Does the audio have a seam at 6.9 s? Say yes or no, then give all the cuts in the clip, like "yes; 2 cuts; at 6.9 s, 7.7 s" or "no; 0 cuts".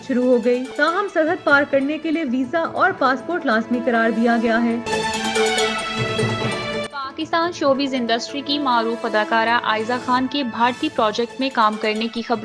yes; 2 cuts; at 4.8 s, 6.9 s